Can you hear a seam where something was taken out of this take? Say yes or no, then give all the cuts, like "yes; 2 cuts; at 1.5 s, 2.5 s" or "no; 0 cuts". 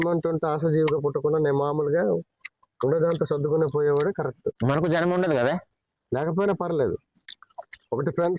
yes; 1 cut; at 4.6 s